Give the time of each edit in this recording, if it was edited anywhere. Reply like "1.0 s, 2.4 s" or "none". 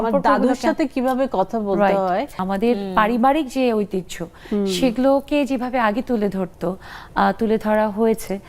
2.4 s